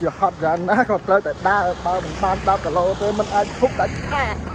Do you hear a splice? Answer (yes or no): no